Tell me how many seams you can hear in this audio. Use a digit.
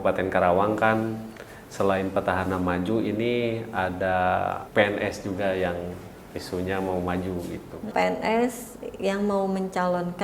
2